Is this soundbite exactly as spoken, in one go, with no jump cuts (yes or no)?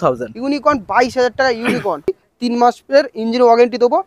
no